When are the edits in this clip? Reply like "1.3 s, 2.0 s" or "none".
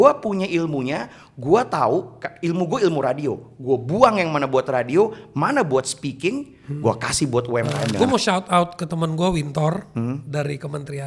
8.0 s